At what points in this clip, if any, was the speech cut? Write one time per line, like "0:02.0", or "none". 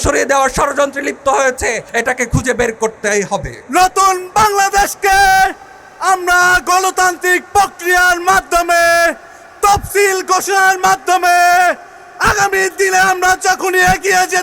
0:01.8
0:03.6